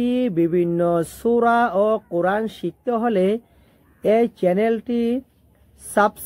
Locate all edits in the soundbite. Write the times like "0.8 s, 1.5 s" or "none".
none